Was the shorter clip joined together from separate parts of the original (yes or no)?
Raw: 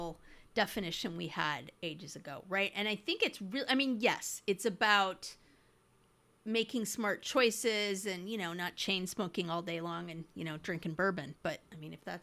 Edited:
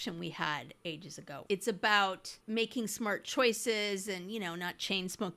yes